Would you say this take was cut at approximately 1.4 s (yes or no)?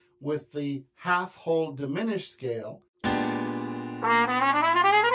no